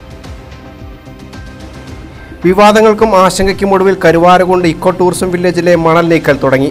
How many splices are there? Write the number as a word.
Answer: zero